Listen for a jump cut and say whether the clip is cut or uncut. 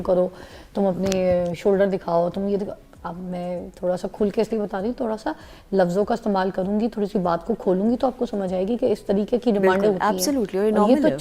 uncut